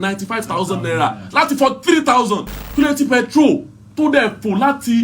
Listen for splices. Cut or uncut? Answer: cut